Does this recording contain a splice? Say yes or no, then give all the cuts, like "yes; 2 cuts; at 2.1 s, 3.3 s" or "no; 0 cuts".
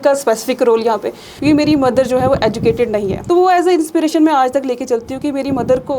yes; 2 cuts; at 1.2 s, 3.1 s